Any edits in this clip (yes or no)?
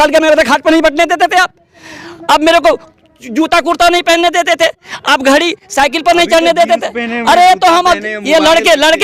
no